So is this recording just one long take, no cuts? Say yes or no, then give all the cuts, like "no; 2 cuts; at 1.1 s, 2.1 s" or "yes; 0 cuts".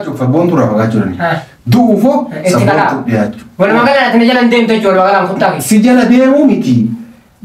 yes; 0 cuts